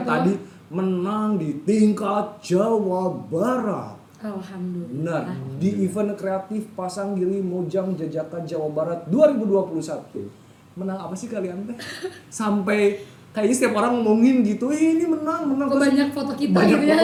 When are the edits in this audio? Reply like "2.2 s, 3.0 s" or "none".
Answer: none